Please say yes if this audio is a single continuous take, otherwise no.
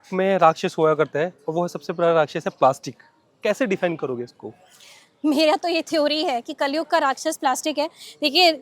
yes